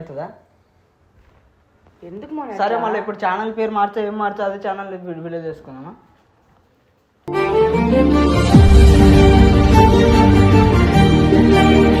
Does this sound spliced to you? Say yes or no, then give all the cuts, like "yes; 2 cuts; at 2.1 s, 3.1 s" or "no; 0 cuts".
no; 0 cuts